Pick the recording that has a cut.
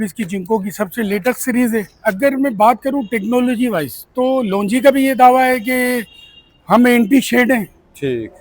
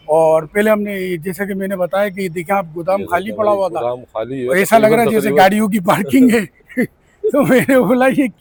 first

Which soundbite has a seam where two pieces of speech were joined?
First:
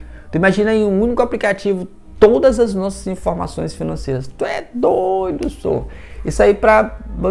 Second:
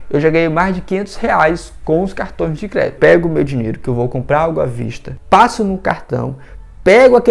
second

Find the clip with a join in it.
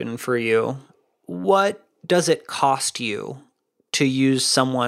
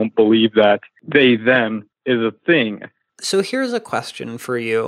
second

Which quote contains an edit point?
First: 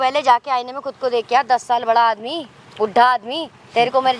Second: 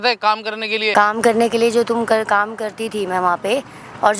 second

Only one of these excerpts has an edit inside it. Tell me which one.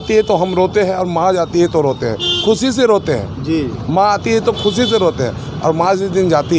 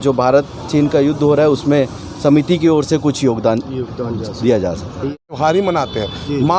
second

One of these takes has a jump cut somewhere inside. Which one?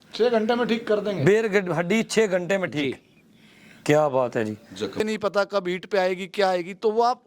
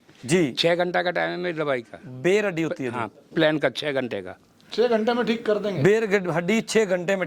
first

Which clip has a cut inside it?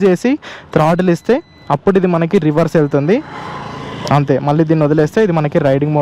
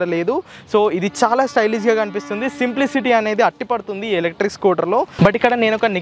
second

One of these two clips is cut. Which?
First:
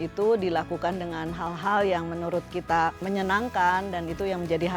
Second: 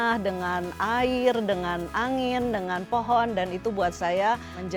first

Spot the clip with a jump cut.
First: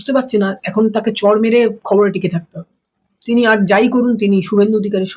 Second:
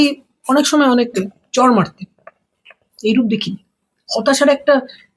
second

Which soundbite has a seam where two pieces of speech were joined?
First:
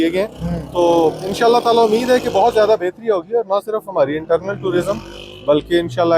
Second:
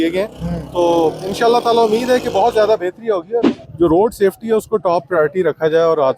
second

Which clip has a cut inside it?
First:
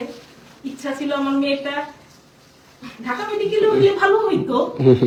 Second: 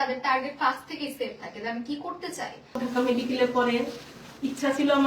second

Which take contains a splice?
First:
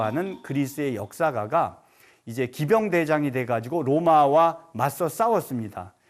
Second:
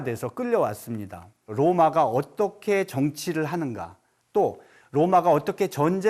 second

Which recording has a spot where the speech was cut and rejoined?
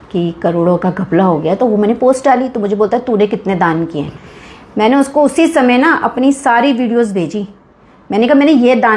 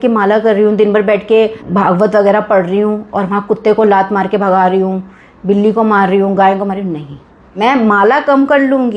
second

